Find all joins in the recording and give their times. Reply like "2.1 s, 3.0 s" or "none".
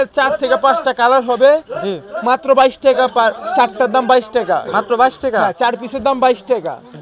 none